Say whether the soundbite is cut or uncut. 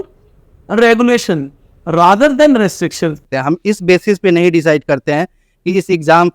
cut